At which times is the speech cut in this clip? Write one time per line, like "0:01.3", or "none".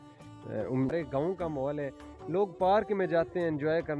0:00.9